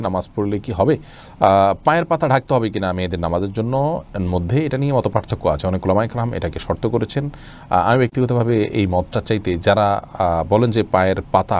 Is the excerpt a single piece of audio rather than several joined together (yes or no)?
yes